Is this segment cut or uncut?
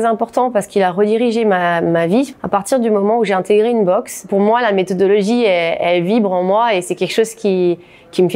cut